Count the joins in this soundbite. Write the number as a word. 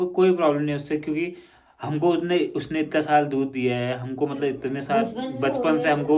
zero